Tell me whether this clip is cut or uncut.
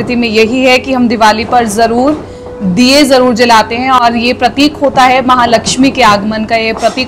uncut